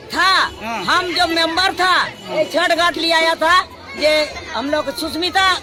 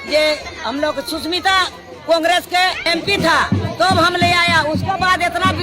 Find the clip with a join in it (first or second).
second